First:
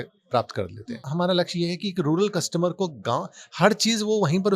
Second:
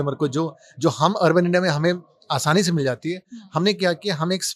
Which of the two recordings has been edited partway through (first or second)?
first